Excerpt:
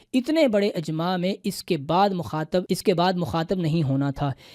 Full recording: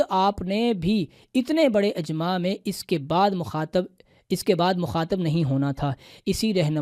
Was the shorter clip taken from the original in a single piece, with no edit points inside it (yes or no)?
no